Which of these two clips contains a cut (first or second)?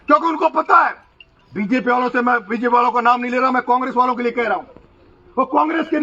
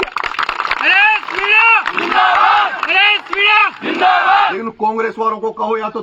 second